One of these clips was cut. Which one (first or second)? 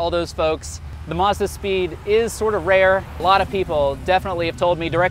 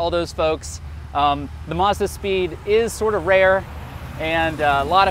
first